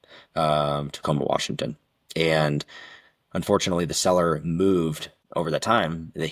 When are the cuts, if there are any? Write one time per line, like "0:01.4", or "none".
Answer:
0:05.2